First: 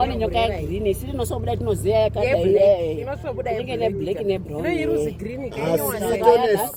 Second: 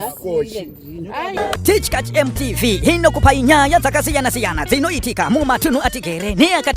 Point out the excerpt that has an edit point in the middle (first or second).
second